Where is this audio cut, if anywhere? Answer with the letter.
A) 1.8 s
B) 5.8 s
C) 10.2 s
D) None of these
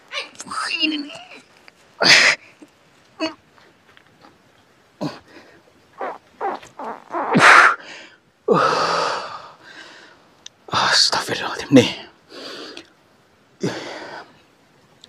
D